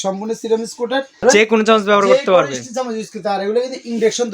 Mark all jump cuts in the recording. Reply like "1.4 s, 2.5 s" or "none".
1.2 s